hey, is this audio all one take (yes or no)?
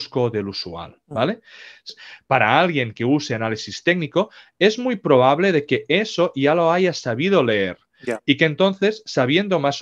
no